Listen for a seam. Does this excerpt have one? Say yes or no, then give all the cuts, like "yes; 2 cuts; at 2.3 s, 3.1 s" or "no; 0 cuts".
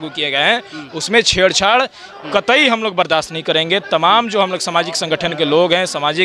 no; 0 cuts